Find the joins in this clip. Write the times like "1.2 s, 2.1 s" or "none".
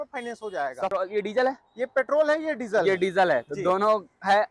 0.9 s